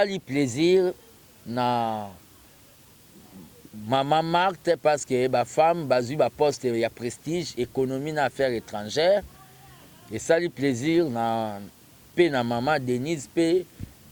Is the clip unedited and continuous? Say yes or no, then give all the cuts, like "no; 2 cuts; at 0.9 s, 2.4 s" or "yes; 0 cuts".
yes; 0 cuts